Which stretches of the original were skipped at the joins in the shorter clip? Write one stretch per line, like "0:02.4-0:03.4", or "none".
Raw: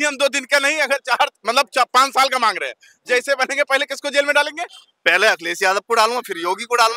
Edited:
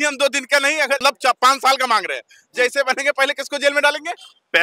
0:01.0-0:01.5